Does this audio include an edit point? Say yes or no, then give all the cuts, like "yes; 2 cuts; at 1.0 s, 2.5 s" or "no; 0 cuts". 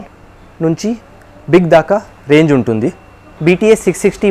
yes; 1 cut; at 3.3 s